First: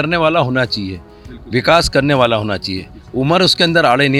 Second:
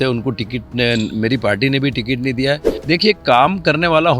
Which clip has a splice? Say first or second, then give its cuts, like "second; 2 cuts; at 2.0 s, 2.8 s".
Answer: second; 1 cut; at 2.7 s